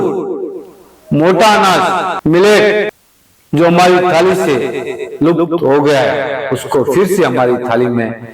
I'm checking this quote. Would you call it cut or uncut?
cut